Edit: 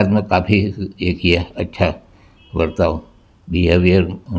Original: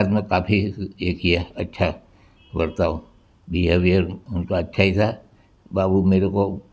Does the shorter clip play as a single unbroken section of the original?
yes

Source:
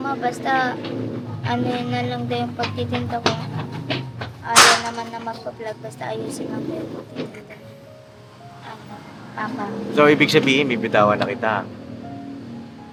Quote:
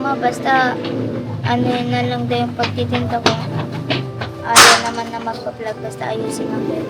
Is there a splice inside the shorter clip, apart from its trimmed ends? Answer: no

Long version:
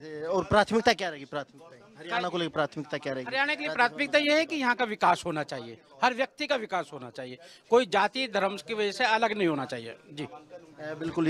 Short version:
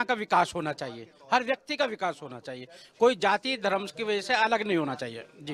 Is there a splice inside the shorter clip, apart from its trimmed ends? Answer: no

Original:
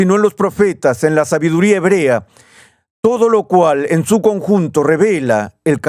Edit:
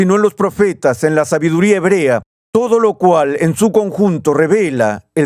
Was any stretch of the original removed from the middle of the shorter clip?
yes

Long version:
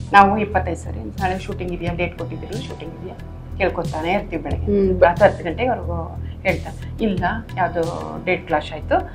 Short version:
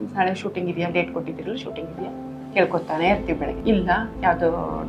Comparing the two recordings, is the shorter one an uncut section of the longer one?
no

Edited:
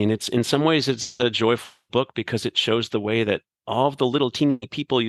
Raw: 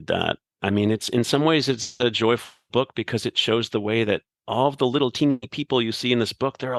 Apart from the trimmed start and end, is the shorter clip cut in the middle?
no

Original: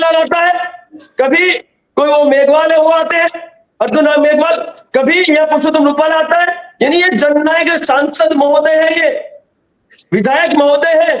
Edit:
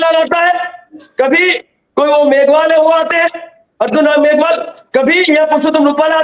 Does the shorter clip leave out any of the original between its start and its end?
no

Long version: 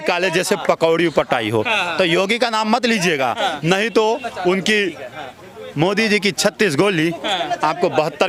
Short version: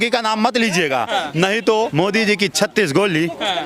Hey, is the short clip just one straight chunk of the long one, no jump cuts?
no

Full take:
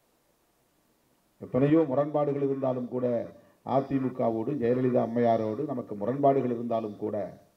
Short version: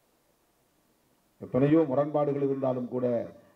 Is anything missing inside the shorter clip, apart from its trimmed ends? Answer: no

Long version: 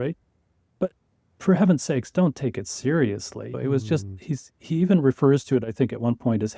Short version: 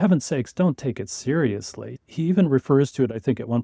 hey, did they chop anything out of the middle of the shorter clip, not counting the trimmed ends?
yes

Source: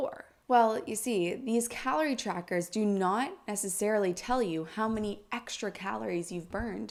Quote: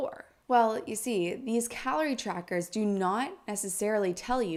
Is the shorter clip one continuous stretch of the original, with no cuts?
yes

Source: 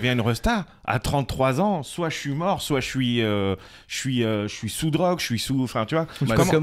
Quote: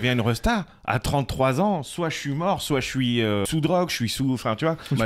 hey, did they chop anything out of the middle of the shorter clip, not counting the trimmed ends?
yes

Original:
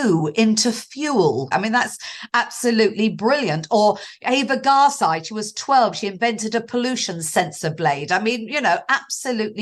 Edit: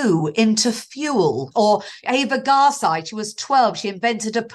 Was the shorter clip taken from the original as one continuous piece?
no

